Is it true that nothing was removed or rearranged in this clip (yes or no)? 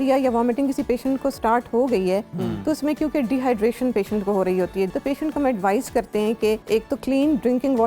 no